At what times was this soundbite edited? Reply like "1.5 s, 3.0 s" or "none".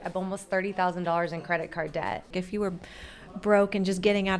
2.3 s